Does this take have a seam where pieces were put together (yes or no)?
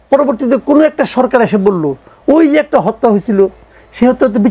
no